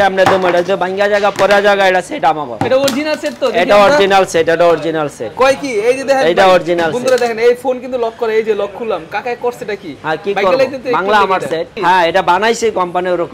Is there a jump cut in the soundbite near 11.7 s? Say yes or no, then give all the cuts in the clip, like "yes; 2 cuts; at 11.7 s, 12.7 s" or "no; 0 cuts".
yes; 1 cut; at 11.7 s